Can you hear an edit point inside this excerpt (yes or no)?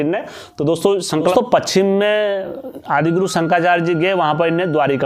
yes